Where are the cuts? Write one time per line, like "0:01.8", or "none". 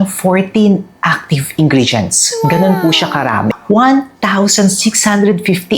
0:03.6